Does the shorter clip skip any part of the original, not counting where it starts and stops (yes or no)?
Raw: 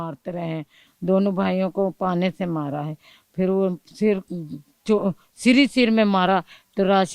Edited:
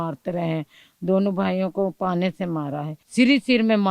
yes